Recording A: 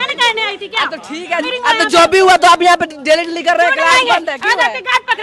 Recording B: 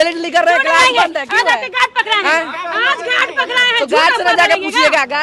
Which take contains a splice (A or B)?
A